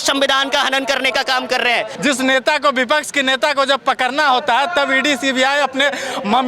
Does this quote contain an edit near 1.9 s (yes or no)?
yes